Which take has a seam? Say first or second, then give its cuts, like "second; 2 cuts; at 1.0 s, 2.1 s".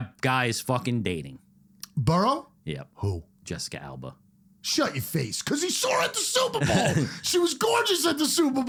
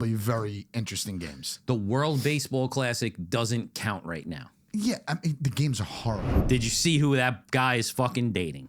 second; 1 cut; at 6.3 s